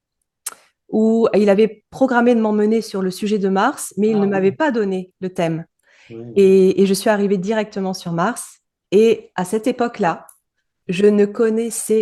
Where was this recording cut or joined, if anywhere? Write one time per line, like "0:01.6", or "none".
none

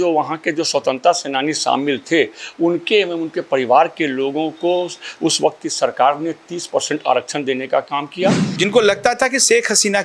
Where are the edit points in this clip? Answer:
0:08.4

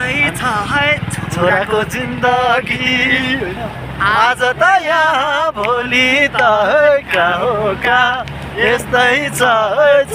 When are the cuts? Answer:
none

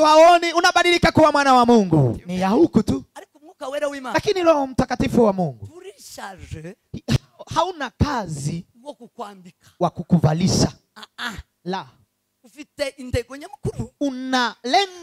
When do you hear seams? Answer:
0:02.2

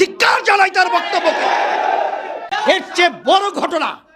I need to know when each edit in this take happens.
0:02.5

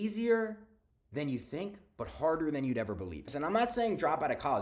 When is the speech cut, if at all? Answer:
0:03.3

